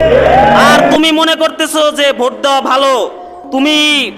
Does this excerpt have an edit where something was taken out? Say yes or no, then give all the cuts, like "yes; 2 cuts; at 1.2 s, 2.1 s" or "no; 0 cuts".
yes; 1 cut; at 0.9 s